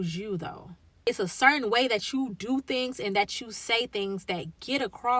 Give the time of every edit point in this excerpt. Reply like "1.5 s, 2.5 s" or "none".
1.1 s